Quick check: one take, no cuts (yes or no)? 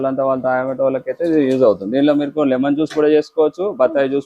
yes